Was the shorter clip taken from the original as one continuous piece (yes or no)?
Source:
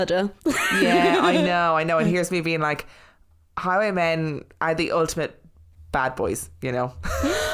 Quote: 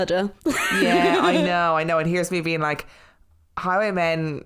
yes